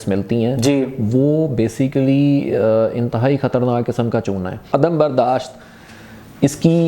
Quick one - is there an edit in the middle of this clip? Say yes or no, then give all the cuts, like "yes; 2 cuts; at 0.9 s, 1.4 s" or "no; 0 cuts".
yes; 1 cut; at 4.6 s